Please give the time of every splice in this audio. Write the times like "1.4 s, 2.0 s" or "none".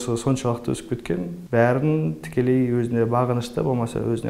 1.4 s